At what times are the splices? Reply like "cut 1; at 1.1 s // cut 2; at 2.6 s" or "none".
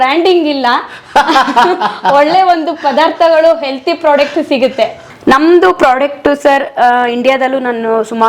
cut 1; at 5.1 s